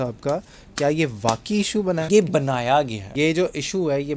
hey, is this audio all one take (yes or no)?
no